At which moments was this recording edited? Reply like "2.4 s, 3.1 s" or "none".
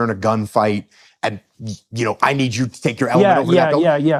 none